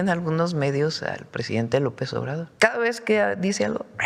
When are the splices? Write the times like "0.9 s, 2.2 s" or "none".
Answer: 2.5 s